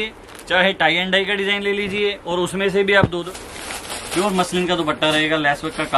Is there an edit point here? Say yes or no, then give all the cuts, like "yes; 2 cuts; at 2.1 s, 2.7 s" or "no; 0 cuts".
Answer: yes; 1 cut; at 3.3 s